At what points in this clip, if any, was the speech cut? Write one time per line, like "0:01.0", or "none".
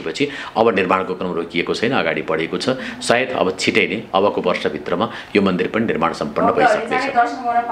none